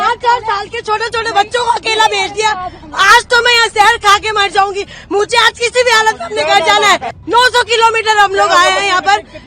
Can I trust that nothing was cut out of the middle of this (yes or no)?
no